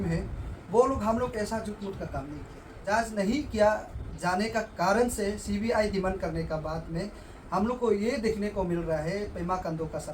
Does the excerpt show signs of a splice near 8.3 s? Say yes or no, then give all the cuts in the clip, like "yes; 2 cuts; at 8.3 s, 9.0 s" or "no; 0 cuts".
no; 1 cut; at 2.8 s